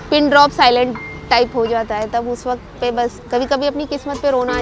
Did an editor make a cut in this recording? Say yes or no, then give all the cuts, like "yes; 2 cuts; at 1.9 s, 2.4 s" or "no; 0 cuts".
yes; 1 cut; at 3.2 s